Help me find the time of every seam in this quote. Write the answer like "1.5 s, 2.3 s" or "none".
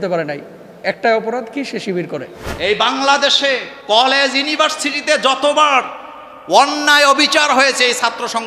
2.4 s, 3.7 s